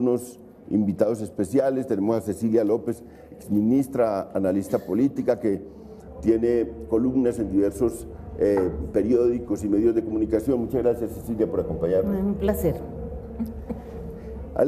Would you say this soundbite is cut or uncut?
uncut